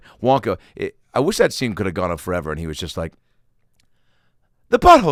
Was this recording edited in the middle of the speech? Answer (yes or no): no